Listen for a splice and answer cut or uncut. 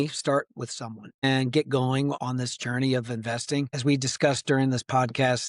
cut